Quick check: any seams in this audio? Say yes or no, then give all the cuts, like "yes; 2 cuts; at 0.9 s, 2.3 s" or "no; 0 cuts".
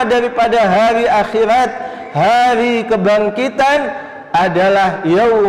no; 0 cuts